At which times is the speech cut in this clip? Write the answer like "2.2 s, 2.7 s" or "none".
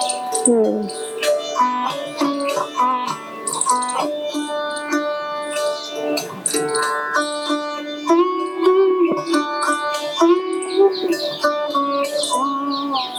none